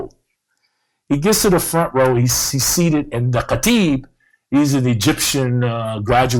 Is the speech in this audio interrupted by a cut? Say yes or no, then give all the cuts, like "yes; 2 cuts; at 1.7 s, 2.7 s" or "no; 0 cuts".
no; 0 cuts